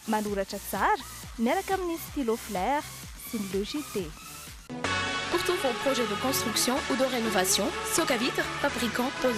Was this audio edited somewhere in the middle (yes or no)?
no